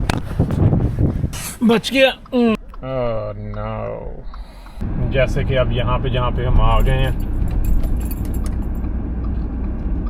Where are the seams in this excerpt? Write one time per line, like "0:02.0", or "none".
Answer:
0:01.4
0:02.6
0:04.8